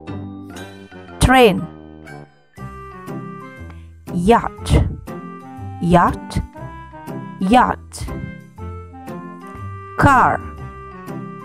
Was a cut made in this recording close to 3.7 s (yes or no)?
yes